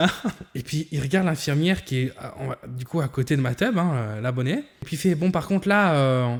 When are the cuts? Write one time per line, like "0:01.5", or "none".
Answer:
none